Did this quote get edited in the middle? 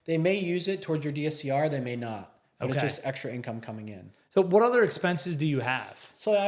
no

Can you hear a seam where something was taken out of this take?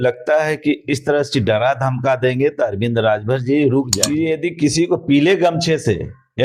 yes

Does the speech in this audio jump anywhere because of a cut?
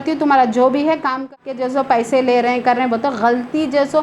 yes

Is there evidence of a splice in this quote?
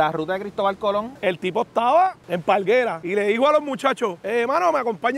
yes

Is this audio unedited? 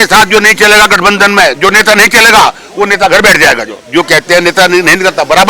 no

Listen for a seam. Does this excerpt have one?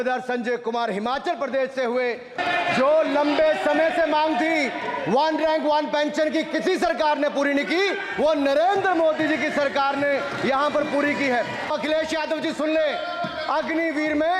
yes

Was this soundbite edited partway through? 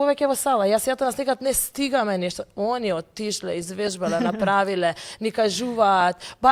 no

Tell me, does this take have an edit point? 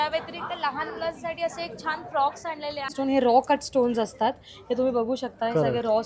yes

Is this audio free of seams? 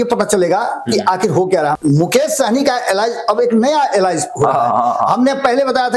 no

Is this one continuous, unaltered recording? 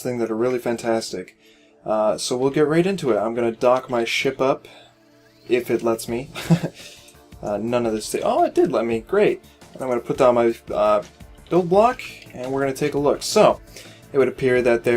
no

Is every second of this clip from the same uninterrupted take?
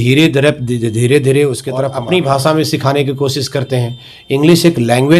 no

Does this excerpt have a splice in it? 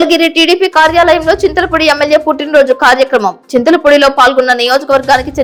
no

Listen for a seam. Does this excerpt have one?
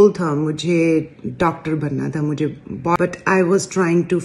yes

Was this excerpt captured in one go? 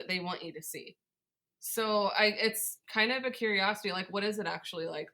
no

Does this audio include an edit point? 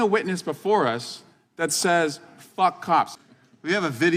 yes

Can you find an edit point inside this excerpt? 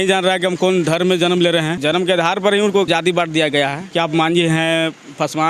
yes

